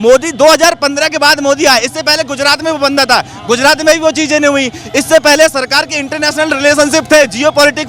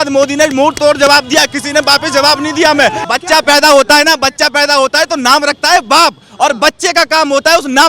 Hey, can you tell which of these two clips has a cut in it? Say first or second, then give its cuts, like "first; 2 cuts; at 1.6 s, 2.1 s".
second; 1 cut; at 3.0 s